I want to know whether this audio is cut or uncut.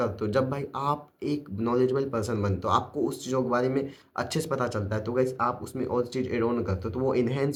uncut